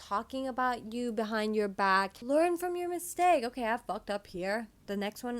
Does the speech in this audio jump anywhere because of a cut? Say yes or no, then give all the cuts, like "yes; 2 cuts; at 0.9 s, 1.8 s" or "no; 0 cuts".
yes; 1 cut; at 2.2 s